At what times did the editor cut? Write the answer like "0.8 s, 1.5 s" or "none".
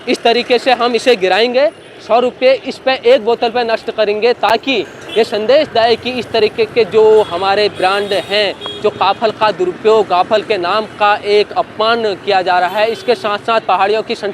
none